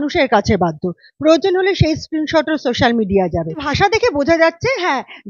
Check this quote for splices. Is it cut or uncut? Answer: cut